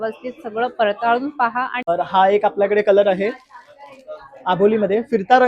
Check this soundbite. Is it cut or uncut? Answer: cut